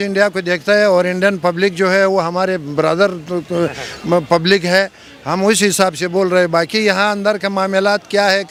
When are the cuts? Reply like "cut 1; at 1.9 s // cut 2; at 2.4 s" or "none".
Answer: none